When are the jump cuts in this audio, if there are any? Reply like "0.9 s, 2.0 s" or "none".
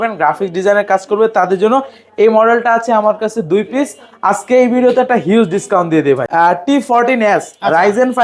6.3 s